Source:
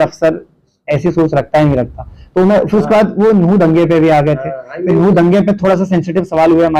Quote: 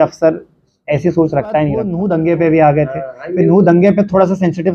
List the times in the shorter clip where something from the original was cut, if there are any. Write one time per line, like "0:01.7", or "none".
0:01.9